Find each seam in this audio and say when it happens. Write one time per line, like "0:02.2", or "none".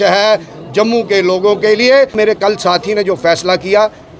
0:02.2

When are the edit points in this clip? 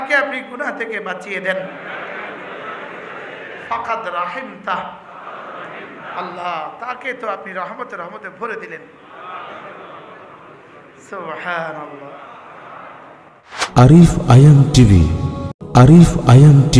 0:13.4

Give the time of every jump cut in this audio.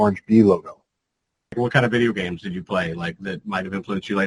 0:01.5

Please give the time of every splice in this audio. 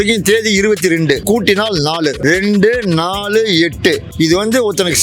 0:01.2
0:02.2
0:04.1

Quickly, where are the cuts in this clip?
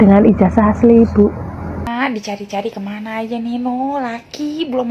0:01.8

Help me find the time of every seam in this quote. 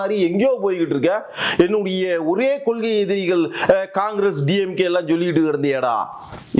none

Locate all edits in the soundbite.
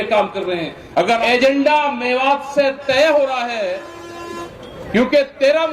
0:01.2

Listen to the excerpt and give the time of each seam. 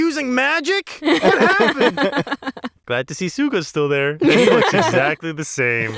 0:02.7

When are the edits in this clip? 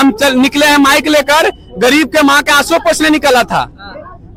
none

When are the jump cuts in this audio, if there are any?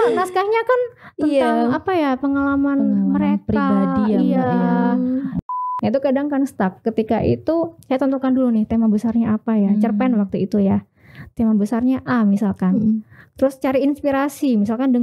0:05.5

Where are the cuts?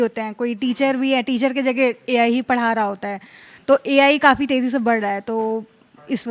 none

